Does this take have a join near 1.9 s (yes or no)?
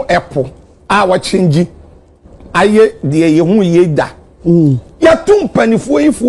no